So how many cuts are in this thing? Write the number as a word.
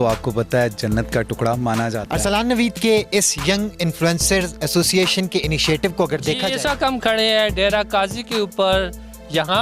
two